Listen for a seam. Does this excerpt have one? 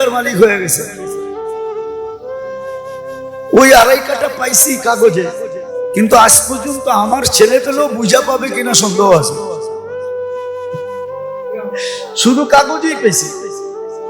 yes; 6 cuts; at 1.3 s, 3.5 s, 9.2 s, 10.8 s, 12.2 s, 13.2 s

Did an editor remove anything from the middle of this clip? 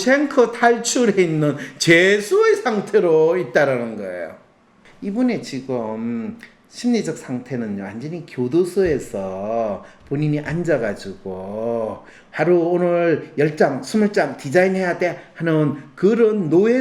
yes; 1 cut; at 4.9 s

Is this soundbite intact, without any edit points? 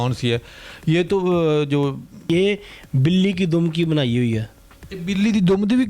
no; 1 cut; at 2.2 s

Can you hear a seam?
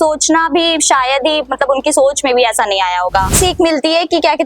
yes; 1 cut; at 3.4 s

